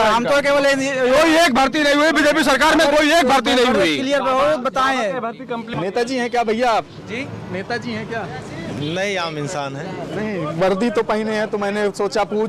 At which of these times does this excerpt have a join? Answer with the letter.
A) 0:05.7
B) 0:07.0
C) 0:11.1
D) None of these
A